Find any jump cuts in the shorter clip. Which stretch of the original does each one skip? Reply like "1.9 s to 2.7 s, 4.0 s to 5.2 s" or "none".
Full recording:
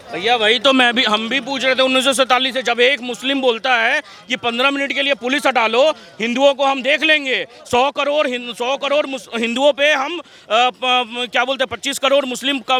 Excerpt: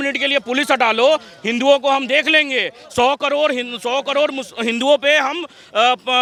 none